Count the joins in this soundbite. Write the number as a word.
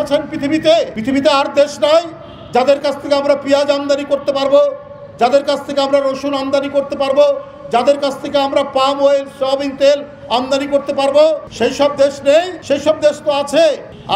three